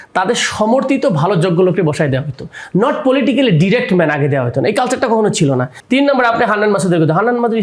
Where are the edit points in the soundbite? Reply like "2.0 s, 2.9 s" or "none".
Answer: 5.8 s